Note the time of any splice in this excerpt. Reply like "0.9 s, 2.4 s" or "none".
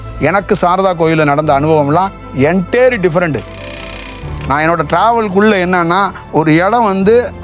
3.8 s